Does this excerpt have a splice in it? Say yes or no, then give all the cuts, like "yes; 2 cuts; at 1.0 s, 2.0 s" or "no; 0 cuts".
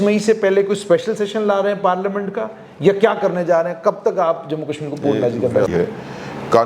yes; 1 cut; at 5.7 s